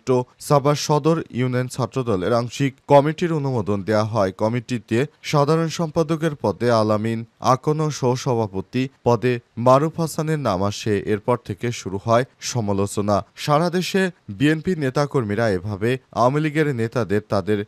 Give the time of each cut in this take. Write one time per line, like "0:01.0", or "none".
none